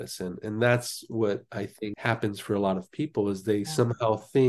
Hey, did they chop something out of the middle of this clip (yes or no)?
no